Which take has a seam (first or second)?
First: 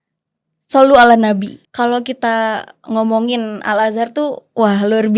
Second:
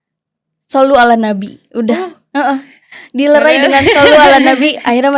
first